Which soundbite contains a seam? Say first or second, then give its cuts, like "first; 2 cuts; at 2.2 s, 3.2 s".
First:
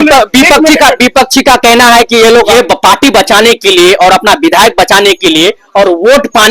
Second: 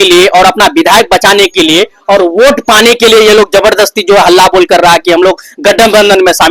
first; 1 cut; at 2.7 s